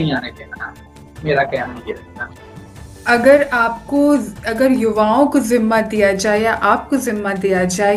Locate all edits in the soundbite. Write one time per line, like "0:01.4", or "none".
none